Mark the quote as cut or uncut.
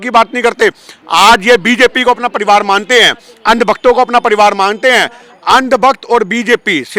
uncut